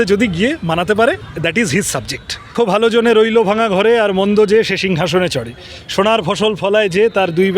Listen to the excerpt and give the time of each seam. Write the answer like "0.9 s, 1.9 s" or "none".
1.3 s, 2.5 s